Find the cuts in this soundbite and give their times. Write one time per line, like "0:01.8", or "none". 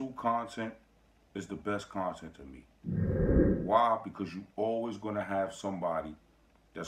0:02.5
0:03.6